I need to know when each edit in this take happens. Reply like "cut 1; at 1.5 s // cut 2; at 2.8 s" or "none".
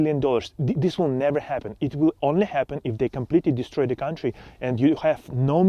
none